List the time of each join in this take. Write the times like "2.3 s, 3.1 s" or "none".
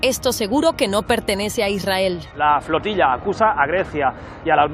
2.3 s

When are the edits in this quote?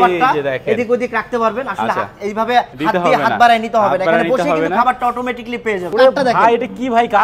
2.7 s, 5.9 s

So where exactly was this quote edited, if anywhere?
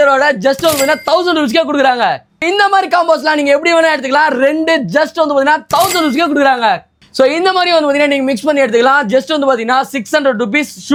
none

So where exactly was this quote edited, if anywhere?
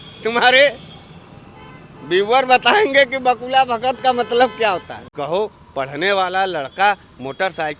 5.0 s

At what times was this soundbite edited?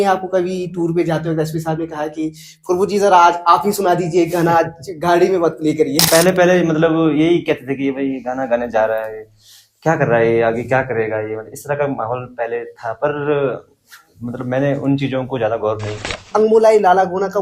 6.1 s, 16.2 s

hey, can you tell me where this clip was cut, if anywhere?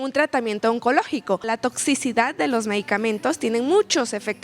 1.4 s

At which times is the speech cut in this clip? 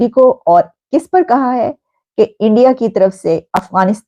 none

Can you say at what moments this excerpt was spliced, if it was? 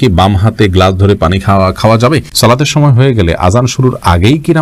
2.3 s

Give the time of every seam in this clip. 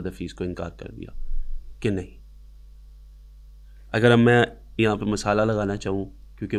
none

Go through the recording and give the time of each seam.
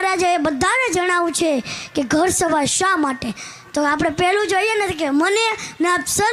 none

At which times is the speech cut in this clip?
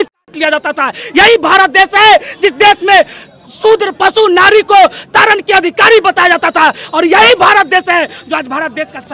none

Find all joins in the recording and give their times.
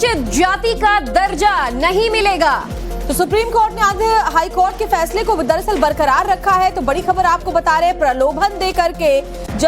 6.8 s

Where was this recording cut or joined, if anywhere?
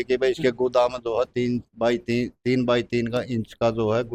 none

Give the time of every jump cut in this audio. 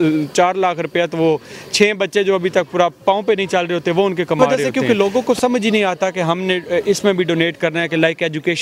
4.4 s

